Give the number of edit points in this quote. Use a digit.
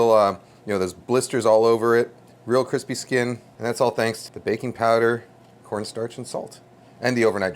2